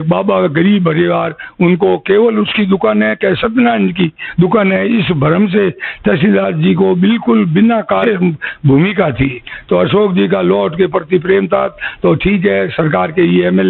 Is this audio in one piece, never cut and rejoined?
no; 1 cut; at 8.0 s

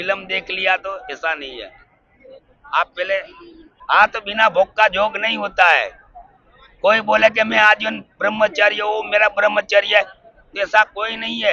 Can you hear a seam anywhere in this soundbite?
yes; 1 cut; at 3.8 s

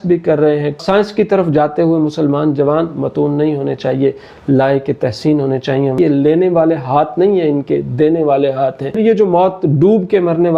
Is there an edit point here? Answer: yes; 3 cuts; at 0.8 s, 6.0 s, 9.0 s

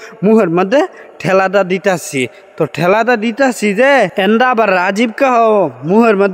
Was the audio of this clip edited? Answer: no; 0 cuts

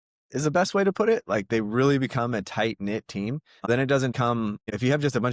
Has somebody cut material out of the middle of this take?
no; 0 cuts

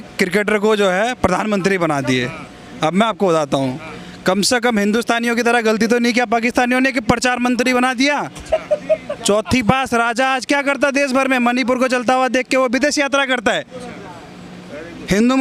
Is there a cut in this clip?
no; 0 cuts

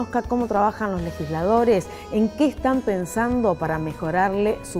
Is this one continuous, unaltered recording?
no; 1 cut; at 1.8 s

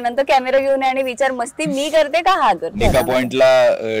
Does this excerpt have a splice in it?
yes; 1 cut; at 2.7 s

